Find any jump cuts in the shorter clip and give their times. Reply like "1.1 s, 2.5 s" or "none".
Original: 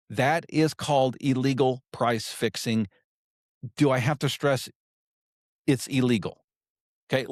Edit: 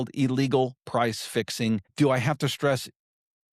1.9 s